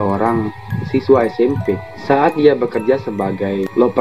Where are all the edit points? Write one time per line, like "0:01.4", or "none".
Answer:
0:01.9